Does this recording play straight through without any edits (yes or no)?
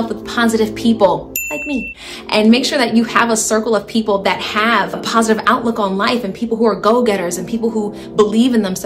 no